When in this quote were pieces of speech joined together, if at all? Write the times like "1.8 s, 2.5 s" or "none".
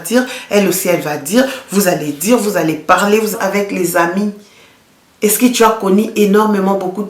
3.3 s